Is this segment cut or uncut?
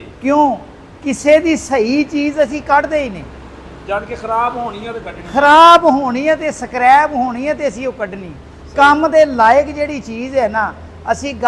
uncut